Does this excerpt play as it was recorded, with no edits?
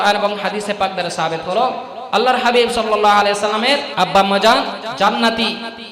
no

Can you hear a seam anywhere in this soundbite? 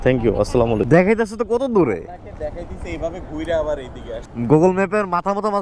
yes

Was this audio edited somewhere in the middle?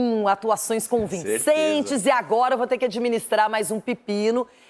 no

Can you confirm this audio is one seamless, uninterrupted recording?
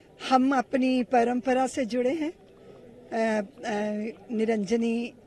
yes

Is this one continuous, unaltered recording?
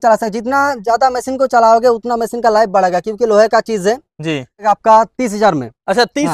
no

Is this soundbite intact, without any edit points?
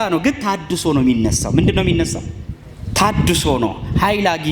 yes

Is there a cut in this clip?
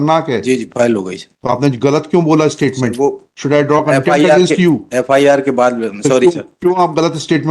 no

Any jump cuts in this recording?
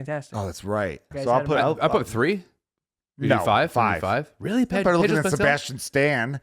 yes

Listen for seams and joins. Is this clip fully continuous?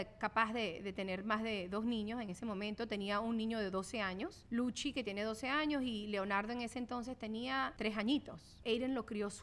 no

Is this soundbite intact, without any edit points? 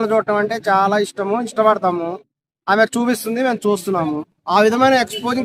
no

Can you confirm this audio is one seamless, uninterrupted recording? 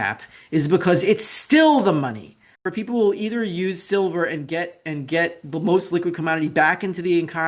no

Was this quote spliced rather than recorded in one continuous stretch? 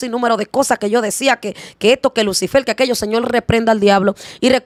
no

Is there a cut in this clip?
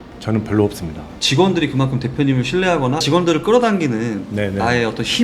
yes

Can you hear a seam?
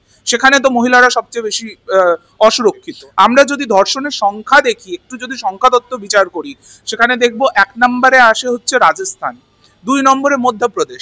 yes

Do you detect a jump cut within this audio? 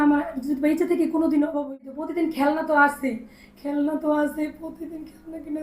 yes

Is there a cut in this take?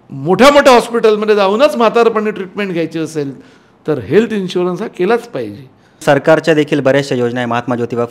yes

